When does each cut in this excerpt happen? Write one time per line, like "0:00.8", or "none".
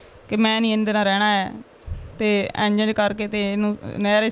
none